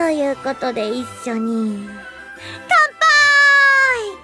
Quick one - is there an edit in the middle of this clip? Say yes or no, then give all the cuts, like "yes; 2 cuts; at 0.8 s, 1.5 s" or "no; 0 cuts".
no; 0 cuts